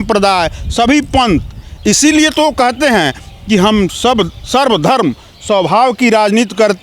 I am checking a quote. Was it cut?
no; 0 cuts

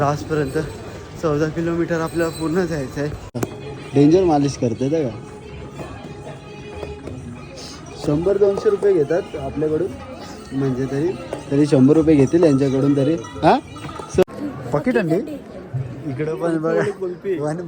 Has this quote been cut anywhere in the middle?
yes; 2 cuts; at 3.4 s, 14.2 s

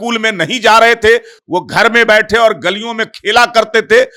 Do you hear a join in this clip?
no; 0 cuts

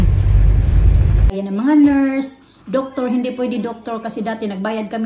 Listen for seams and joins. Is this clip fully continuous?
no; 1 cut; at 1.3 s

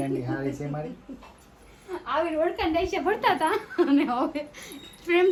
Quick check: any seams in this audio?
no; 0 cuts

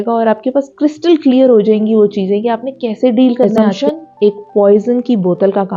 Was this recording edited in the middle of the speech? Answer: yes; 1 cut; at 3.7 s

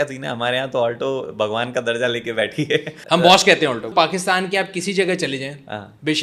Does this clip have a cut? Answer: yes; 2 cuts; at 3.0 s, 3.9 s

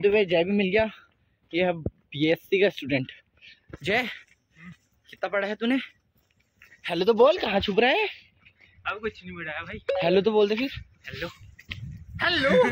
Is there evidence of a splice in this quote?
no; 0 cuts

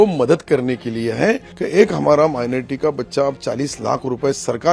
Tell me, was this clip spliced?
yes; 1 cut; at 1.5 s

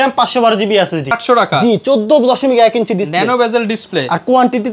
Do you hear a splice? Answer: yes; 1 cut; at 1.2 s

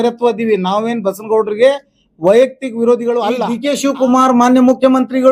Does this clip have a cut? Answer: yes; 1 cut; at 3.6 s

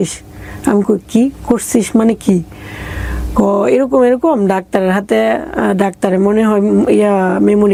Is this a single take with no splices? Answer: yes; 0 cuts

